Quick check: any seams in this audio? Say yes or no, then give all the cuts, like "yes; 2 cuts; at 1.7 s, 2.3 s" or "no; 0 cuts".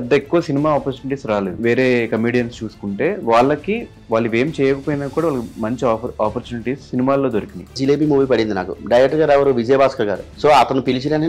yes; 3 cuts; at 1.6 s, 7.7 s, 10.3 s